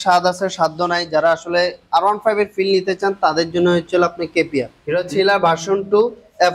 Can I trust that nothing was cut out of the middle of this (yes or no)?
no